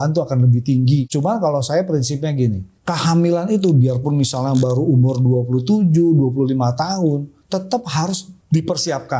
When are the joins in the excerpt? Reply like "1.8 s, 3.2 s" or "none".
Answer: 1.1 s, 2.7 s, 7.4 s, 8.3 s